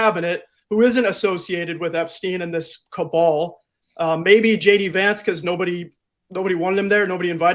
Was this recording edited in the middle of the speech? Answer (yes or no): no